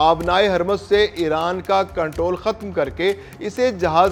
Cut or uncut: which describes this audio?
uncut